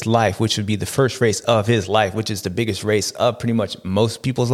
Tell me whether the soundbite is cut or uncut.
uncut